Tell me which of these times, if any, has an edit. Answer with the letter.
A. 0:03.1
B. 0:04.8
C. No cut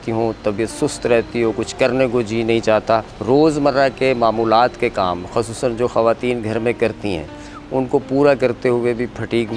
A